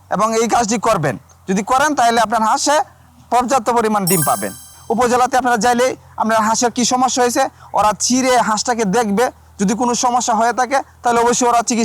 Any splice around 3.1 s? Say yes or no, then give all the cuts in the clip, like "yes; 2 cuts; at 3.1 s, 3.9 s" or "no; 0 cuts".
no; 1 cut; at 4.7 s